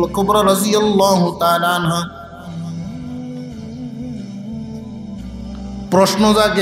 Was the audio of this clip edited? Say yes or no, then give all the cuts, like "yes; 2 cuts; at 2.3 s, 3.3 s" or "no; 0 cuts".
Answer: yes; 3 cuts; at 2.2 s, 3.8 s, 5.5 s